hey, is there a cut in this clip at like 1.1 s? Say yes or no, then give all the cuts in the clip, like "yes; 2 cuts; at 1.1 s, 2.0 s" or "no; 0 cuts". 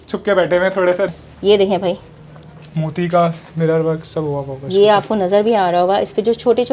yes; 1 cut; at 1.1 s